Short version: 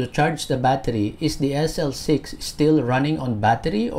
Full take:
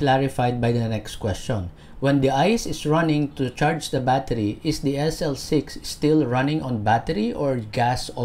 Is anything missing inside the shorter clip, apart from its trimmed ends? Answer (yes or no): no